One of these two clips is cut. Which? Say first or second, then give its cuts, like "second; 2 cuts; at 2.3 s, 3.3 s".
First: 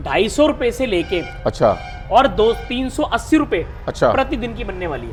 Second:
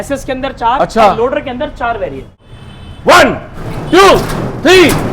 second; 1 cut; at 2.4 s